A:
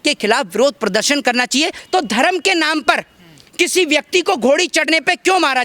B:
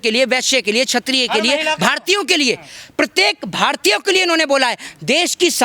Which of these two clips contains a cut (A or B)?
A